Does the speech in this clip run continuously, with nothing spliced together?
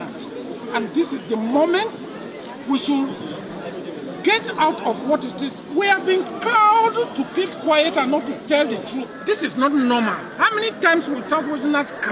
no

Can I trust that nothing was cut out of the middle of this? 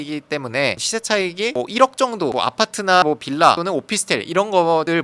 no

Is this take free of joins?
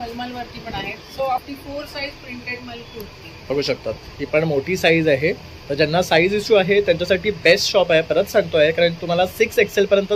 no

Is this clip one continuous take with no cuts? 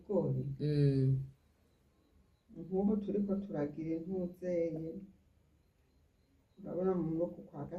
yes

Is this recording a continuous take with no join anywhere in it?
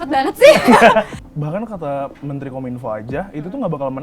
no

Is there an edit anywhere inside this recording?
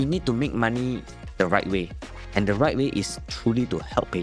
no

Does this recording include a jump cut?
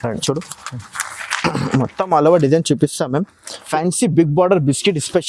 yes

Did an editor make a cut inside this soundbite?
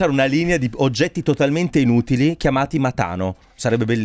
no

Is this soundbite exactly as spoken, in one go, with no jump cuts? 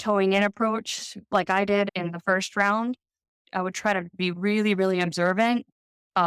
no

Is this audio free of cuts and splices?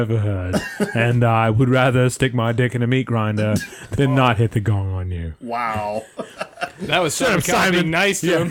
no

